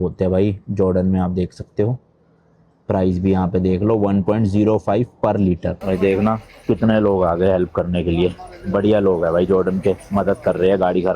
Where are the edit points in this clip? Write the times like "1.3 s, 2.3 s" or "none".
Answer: 5.8 s